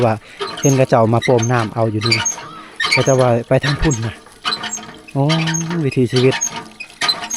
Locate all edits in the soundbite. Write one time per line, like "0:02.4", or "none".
none